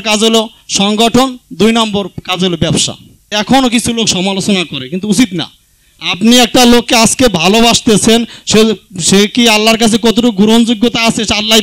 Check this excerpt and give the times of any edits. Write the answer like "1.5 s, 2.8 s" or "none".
3.3 s